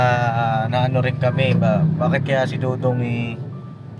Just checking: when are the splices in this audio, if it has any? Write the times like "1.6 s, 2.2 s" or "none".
none